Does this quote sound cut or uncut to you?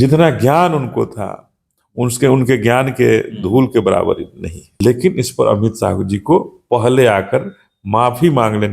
cut